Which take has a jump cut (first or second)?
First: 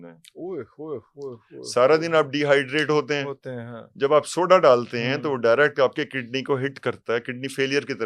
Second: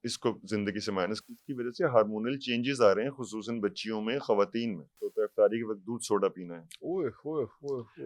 second